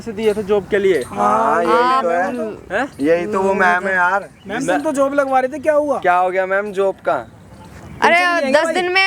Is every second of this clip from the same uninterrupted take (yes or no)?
yes